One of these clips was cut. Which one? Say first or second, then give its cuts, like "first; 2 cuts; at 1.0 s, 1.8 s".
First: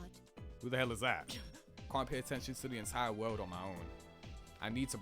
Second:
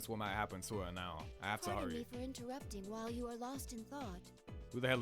first; 1 cut; at 1.9 s